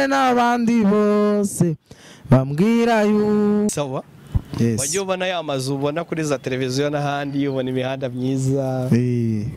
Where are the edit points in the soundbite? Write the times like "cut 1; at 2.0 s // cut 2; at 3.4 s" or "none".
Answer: cut 1; at 3.7 s